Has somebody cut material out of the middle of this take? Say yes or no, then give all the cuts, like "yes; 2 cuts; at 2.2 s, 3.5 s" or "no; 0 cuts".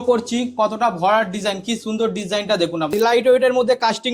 yes; 1 cut; at 2.9 s